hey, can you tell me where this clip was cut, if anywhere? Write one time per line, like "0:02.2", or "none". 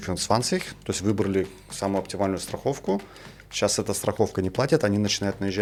none